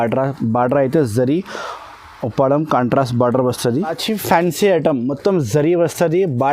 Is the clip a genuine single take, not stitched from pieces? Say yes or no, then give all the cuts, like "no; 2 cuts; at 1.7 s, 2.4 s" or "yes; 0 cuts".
no; 1 cut; at 4.0 s